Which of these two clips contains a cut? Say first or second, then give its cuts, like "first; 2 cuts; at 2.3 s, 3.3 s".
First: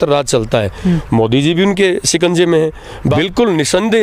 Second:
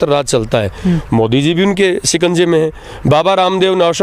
first; 1 cut; at 3.1 s